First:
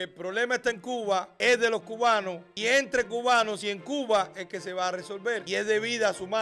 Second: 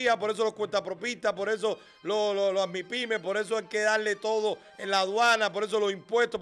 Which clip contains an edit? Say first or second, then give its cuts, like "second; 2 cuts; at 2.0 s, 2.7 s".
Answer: first; 3 cuts; at 1.3 s, 2.4 s, 5.4 s